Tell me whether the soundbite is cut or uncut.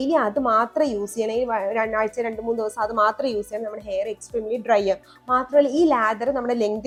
uncut